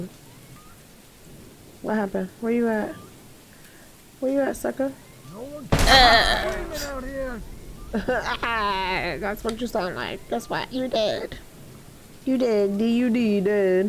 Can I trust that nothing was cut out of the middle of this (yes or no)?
yes